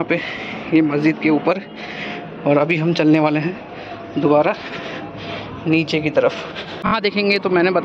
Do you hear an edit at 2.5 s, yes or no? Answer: no